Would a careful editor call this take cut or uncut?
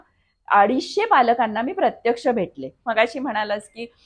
cut